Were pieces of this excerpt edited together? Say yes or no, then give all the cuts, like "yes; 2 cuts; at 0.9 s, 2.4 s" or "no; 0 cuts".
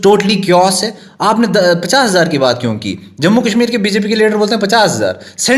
no; 0 cuts